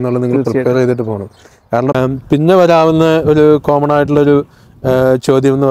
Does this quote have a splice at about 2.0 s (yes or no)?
yes